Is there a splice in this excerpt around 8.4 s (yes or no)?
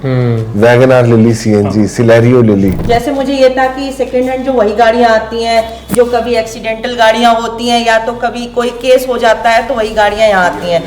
no